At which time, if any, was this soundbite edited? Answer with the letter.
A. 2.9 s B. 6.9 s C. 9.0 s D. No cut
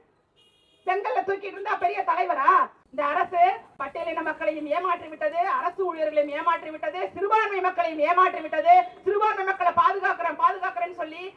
A